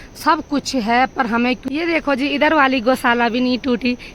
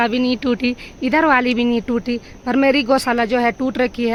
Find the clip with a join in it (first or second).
first